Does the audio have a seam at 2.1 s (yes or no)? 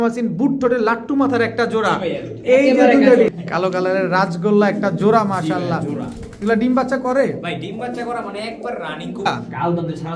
no